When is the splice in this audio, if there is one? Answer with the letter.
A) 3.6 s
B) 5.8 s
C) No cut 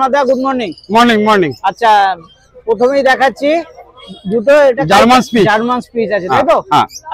C